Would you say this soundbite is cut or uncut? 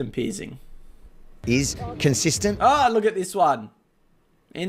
cut